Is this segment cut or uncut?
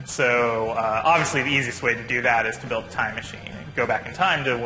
uncut